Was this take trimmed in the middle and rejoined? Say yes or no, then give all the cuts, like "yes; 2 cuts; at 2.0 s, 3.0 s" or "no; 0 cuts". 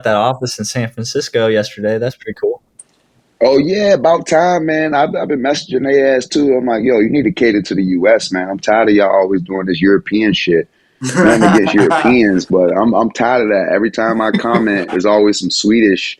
no; 0 cuts